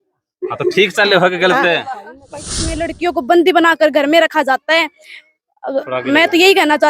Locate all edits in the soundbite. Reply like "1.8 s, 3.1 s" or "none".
2.3 s